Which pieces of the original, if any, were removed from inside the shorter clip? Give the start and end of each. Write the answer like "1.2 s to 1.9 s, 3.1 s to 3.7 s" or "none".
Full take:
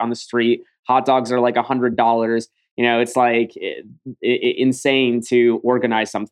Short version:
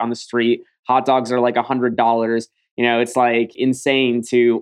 3.6 s to 4.6 s